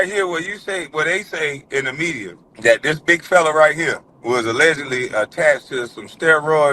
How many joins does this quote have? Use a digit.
2